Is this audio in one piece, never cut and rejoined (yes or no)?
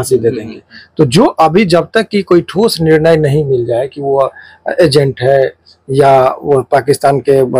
yes